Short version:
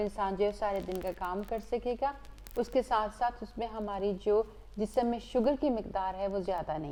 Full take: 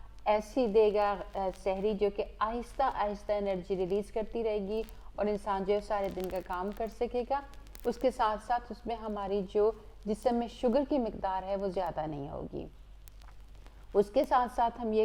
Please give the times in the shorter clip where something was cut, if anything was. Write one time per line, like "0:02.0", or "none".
none